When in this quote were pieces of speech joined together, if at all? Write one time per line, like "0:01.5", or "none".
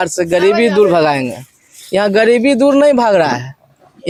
none